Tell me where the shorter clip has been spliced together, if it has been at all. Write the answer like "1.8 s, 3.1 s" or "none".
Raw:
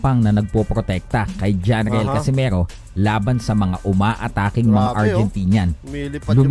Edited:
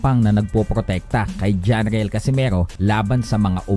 2.7 s